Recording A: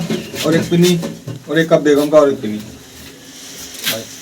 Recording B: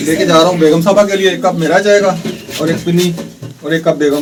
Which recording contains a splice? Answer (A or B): A